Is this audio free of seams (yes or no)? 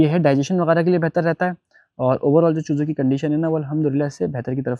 yes